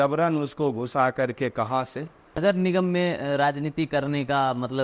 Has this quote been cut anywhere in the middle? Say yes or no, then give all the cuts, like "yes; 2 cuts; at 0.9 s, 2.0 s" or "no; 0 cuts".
yes; 1 cut; at 2.4 s